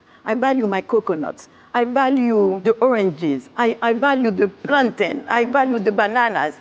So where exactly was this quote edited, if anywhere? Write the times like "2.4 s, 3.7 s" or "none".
2.6 s